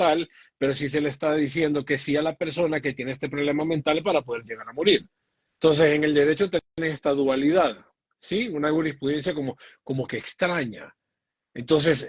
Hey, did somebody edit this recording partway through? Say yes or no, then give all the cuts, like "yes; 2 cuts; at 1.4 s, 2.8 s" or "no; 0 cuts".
no; 0 cuts